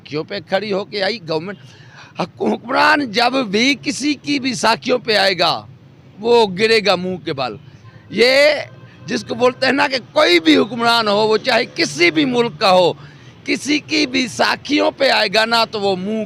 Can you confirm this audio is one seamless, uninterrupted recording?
yes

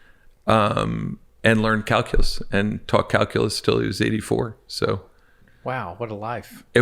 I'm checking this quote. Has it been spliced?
yes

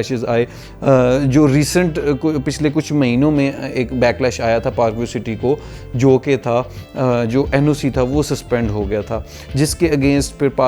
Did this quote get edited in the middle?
no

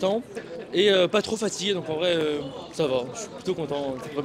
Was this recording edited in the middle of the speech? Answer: no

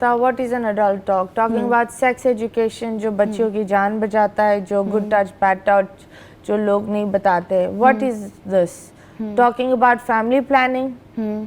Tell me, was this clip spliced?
no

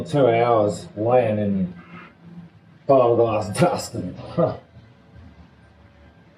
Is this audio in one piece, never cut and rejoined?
yes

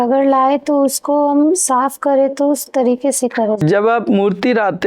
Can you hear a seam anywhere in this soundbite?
yes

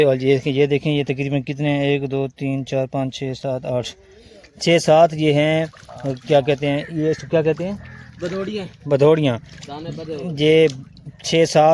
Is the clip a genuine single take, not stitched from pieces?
yes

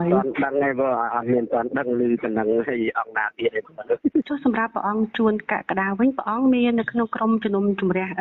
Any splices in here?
yes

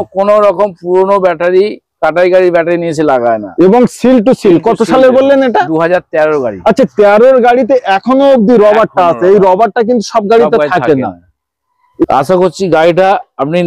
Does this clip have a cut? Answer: yes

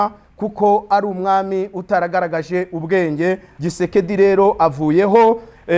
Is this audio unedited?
no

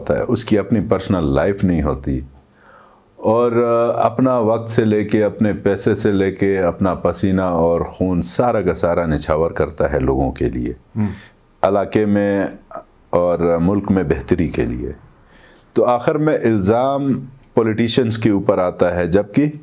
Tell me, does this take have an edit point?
no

